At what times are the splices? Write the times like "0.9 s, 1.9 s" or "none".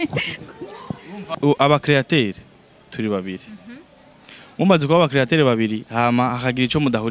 1.3 s